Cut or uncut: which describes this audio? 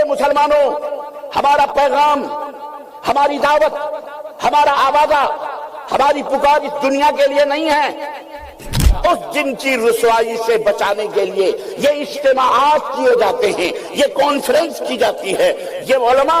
cut